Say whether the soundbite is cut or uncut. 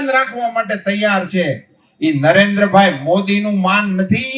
uncut